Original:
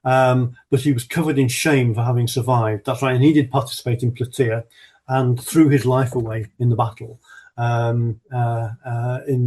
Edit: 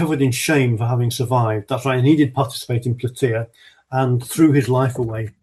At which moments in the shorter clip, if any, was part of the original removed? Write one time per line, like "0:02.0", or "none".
none